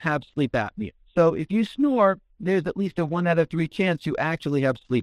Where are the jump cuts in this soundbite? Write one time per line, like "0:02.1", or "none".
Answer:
none